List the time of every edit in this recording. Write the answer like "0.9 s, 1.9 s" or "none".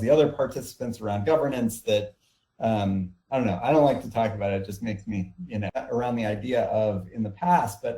5.8 s